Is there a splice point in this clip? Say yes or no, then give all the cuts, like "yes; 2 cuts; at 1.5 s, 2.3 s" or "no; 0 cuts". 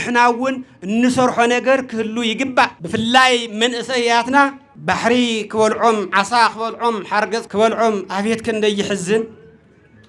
yes; 3 cuts; at 2.8 s, 4.7 s, 7.5 s